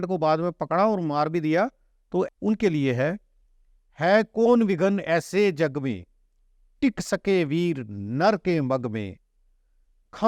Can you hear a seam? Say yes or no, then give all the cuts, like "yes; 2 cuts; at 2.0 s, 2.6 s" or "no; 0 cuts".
yes; 1 cut; at 2.3 s